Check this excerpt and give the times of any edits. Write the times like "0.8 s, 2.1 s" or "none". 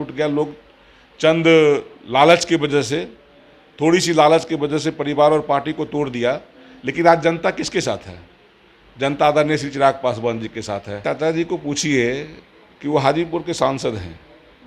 11.0 s